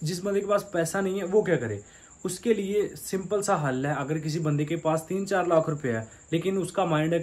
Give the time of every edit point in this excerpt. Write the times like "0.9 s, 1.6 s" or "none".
none